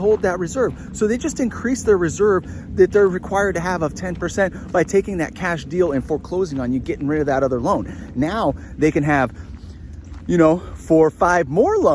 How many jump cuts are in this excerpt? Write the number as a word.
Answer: zero